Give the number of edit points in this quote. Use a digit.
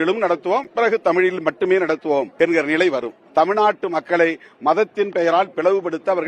2